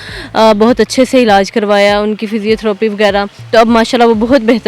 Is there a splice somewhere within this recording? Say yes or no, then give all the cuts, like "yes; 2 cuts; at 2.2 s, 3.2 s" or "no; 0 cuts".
no; 0 cuts